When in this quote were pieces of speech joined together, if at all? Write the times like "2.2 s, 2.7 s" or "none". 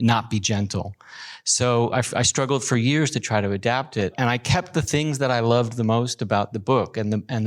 4.1 s